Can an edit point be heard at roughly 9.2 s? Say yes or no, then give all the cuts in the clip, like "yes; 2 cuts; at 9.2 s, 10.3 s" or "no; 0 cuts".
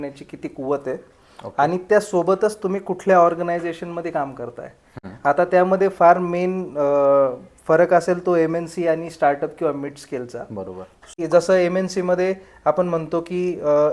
no; 1 cut; at 11.2 s